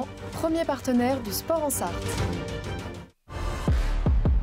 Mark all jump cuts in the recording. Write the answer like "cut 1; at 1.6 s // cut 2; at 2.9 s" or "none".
cut 1; at 3.5 s